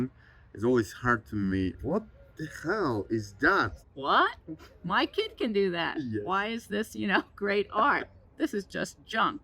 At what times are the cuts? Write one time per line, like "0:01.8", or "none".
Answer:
0:01.8
0:03.8
0:08.2